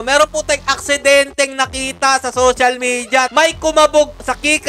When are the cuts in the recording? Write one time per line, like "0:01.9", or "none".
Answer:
0:03.3